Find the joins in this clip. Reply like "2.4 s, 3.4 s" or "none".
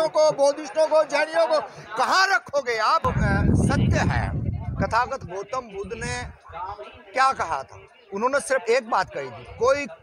3.0 s